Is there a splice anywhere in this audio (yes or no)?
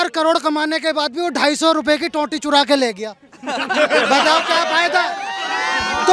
no